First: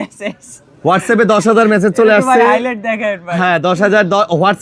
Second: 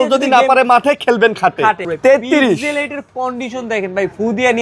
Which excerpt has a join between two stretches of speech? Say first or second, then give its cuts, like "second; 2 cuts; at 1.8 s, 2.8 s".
second; 1 cut; at 1.8 s